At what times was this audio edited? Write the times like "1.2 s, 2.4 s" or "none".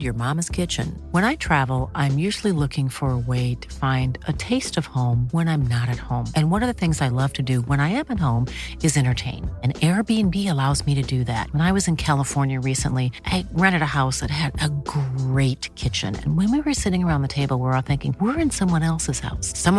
none

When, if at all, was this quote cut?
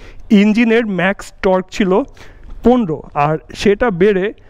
none

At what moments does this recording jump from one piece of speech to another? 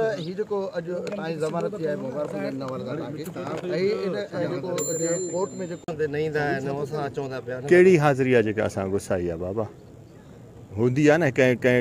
5.8 s

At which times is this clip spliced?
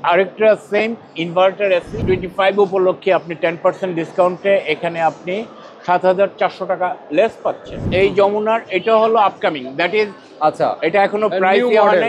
1.9 s, 7.8 s

